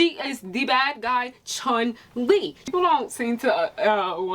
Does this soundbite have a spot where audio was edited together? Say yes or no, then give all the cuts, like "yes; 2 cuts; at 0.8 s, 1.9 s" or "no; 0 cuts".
yes; 1 cut; at 2.6 s